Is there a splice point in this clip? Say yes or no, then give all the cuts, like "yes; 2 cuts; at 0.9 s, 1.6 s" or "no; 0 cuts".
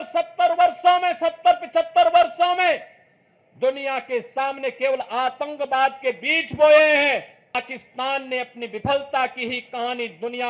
yes; 1 cut; at 7.5 s